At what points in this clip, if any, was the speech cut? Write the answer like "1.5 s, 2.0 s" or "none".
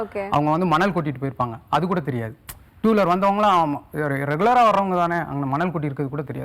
none